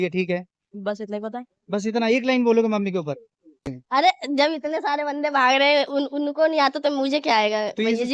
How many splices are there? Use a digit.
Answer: 1